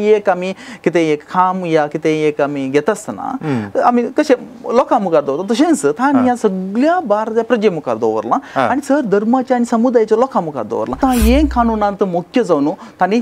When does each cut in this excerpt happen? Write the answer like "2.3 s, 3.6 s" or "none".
11.0 s